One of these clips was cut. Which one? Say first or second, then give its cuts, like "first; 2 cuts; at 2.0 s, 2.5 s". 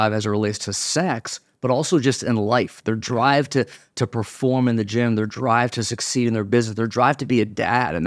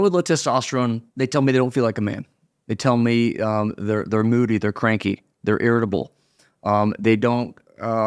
second; 1 cut; at 1.1 s